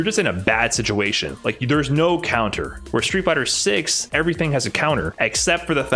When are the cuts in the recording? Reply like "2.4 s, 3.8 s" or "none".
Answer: 2.7 s, 4.1 s